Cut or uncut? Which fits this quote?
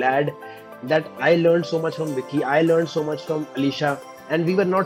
uncut